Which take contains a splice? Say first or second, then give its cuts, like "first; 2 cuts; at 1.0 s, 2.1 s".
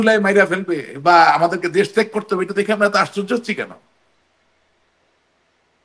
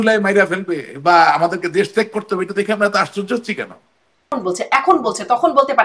second; 1 cut; at 4.3 s